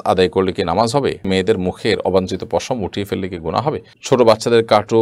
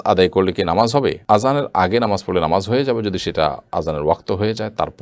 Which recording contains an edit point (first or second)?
first